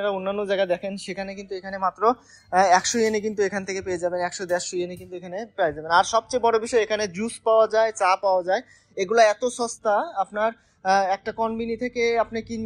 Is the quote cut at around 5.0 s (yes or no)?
no